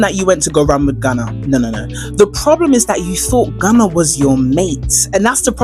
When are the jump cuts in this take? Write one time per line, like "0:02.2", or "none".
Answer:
none